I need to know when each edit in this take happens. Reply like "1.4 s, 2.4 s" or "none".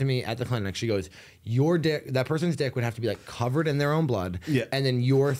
none